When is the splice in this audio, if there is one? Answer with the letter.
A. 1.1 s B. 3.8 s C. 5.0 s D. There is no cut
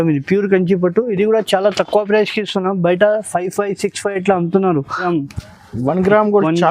C